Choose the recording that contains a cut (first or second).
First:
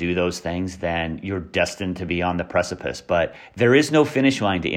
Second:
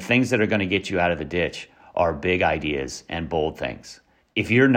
first